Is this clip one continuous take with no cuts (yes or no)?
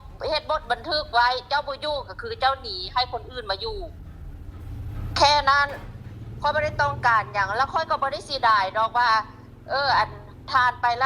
yes